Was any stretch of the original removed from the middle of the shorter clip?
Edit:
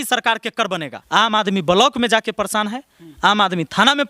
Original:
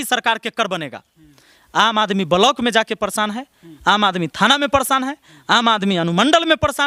yes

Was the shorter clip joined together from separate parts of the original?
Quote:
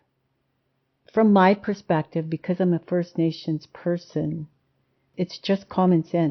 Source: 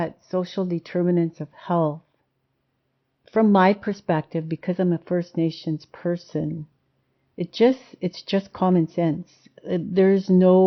yes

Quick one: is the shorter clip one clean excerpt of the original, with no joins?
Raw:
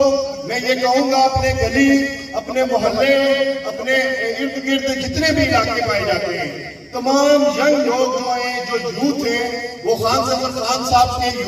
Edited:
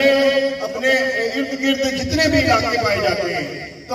yes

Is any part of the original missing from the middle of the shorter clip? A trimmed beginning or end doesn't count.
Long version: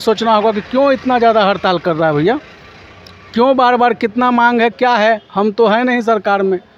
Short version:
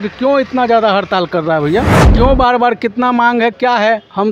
yes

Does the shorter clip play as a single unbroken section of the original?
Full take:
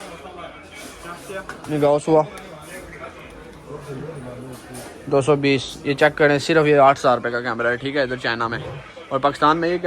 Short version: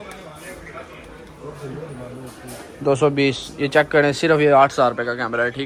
yes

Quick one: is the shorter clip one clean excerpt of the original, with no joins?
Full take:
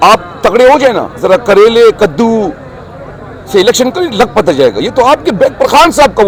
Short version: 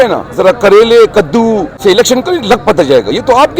no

